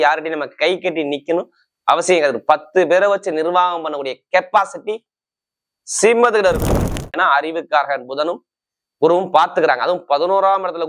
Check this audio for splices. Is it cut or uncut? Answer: cut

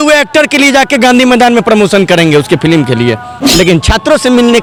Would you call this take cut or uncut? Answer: uncut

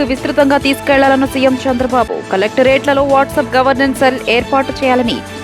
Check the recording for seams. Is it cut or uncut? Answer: uncut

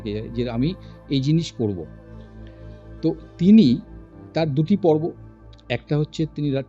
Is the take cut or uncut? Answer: uncut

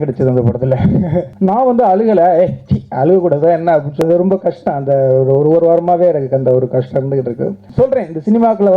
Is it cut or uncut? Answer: cut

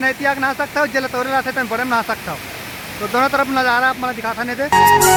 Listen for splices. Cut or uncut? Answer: uncut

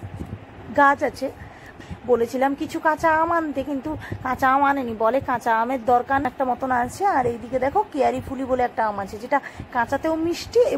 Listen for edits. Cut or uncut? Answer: cut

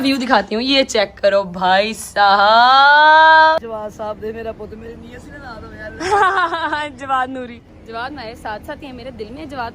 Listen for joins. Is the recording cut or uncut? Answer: cut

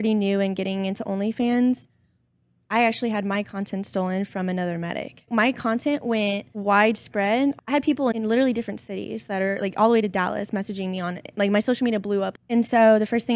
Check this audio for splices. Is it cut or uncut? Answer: cut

